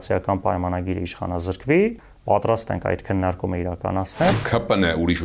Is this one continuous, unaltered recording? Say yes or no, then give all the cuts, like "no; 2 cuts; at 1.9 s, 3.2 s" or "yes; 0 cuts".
no; 2 cuts; at 2.1 s, 4.3 s